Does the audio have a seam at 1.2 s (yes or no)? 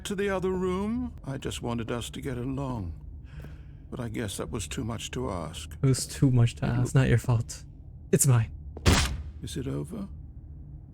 yes